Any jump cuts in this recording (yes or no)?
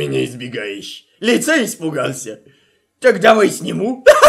no